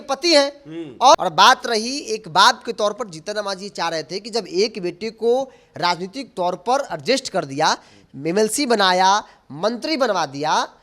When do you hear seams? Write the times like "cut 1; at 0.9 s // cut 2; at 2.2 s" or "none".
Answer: cut 1; at 1.1 s